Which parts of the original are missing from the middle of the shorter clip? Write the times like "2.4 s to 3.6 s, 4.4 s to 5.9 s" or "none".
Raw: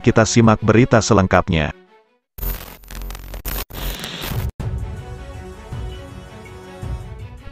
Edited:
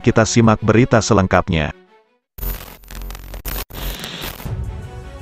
4.3 s to 4.4 s